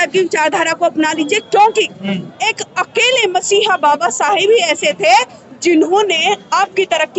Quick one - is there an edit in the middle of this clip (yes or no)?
no